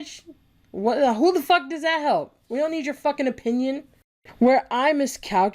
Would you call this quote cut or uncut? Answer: cut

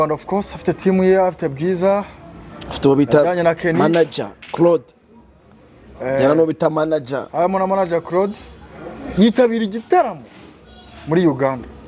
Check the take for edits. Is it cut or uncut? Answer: uncut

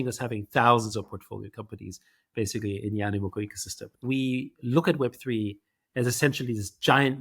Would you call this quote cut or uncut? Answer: cut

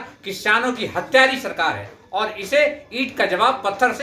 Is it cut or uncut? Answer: uncut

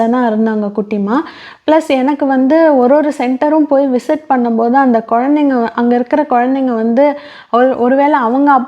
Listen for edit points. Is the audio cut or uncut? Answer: uncut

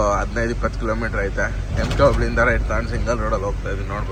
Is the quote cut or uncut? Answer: uncut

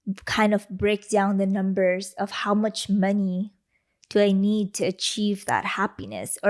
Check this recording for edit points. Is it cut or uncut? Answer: uncut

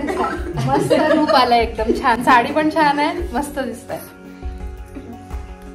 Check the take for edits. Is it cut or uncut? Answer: uncut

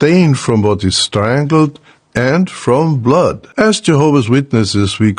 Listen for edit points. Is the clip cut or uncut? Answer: cut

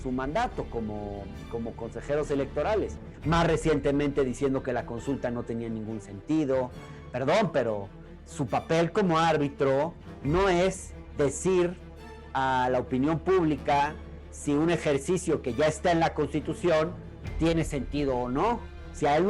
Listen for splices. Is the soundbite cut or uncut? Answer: cut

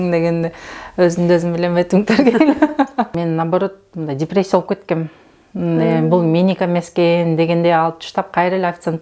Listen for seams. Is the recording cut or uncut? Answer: cut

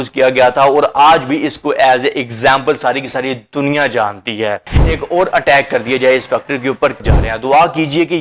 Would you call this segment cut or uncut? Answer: cut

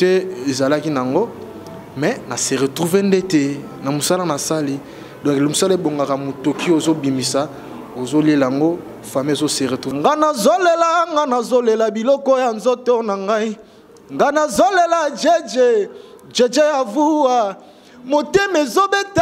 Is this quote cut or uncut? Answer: cut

